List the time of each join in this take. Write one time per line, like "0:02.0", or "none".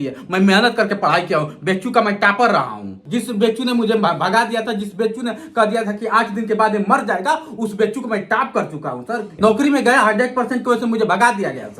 0:03.0
0:09.3